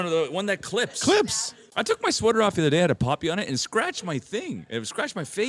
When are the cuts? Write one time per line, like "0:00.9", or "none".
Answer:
0:01.7